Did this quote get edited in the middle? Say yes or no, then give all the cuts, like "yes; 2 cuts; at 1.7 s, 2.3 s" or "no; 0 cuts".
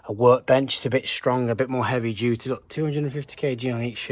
no; 0 cuts